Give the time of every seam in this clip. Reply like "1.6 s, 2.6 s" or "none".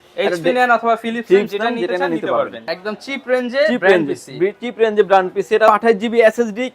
2.6 s, 5.7 s

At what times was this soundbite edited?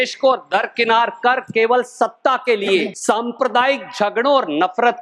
2.9 s

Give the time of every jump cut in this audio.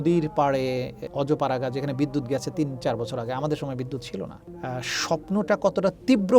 1.0 s, 4.5 s

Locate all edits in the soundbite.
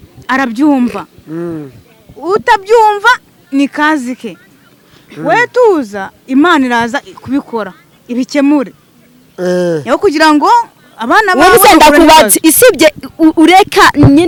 none

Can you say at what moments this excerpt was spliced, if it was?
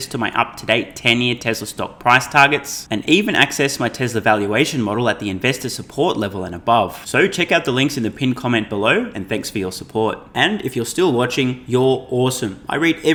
none

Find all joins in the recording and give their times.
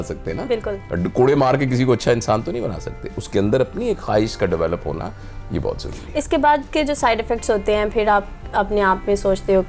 none

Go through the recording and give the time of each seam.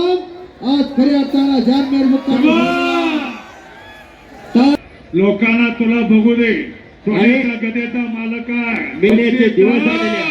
4.8 s, 9.1 s

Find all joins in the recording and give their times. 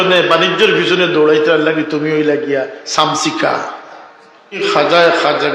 4.6 s

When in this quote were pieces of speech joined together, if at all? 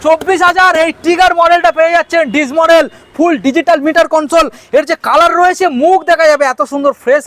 none

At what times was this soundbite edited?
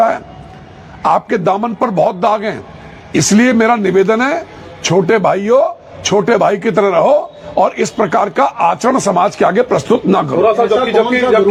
none

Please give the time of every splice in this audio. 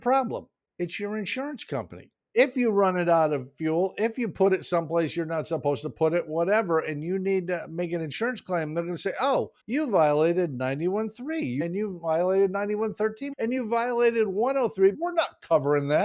2.1 s, 9.6 s, 11.6 s, 13.3 s, 15.0 s

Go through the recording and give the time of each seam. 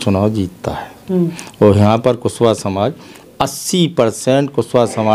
none

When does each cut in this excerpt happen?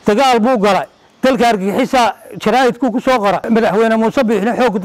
3.5 s

